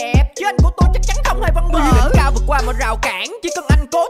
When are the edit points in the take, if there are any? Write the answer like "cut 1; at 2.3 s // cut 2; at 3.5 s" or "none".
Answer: cut 1; at 2.0 s